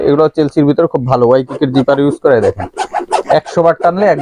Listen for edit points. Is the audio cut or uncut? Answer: uncut